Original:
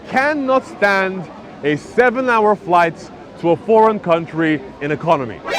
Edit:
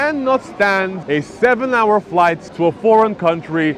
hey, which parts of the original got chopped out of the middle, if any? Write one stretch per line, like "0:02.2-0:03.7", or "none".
0:01.2-0:01.5
0:03.0-0:03.3